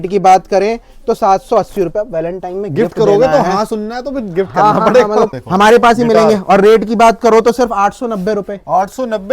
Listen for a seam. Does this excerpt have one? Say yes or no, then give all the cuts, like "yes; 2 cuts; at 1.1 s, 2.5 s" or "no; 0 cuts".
yes; 1 cut; at 5.3 s